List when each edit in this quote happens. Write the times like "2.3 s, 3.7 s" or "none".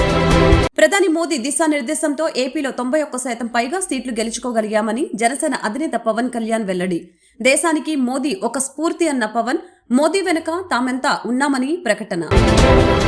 none